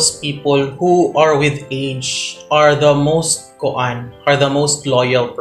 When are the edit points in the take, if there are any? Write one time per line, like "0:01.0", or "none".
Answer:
none